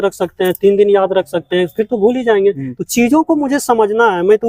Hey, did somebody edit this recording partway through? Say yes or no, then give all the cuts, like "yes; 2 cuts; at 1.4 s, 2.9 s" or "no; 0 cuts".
no; 0 cuts